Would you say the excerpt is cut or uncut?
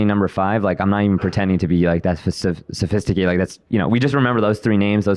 uncut